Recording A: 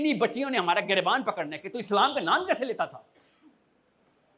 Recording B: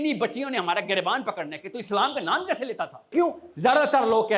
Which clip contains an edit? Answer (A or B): B